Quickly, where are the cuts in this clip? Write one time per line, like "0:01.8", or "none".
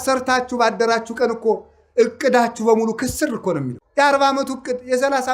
0:03.8